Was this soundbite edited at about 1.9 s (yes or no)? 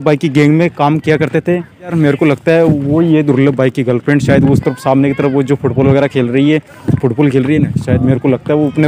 yes